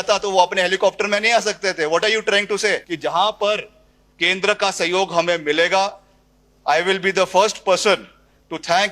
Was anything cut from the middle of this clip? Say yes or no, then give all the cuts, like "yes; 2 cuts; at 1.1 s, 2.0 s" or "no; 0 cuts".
yes; 1 cut; at 2.9 s